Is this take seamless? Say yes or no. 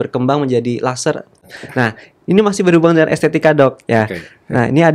no